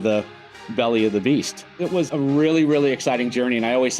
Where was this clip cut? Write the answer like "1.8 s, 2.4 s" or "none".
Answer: 1.9 s